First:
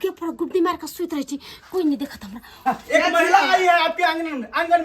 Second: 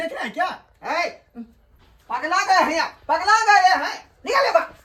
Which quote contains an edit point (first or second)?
first